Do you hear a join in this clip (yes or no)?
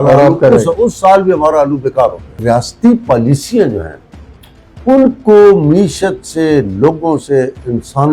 yes